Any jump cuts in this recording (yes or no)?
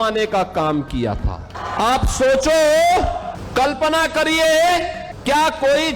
yes